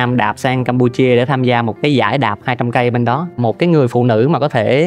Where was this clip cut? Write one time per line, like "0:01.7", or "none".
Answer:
none